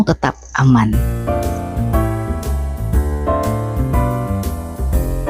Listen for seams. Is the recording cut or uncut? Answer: cut